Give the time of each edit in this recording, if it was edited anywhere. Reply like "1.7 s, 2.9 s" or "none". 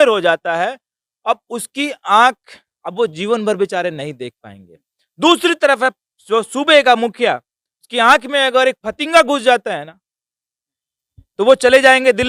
none